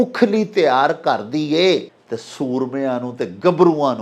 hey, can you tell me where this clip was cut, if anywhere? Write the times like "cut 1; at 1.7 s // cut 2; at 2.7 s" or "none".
cut 1; at 2.0 s